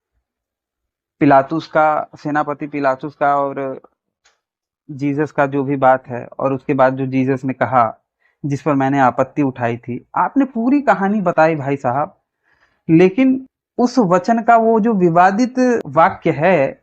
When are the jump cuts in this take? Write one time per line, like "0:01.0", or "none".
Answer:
0:13.6
0:15.9